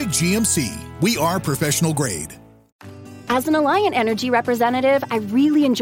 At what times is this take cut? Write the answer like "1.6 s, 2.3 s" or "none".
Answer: 3.0 s